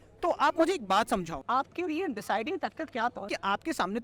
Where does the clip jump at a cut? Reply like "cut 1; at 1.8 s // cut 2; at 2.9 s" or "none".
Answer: cut 1; at 1.4 s